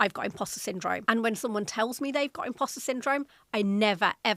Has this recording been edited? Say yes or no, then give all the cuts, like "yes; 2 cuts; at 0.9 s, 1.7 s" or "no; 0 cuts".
yes; 1 cut; at 1.0 s